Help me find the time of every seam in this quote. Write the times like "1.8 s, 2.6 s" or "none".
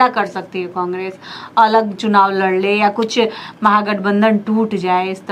none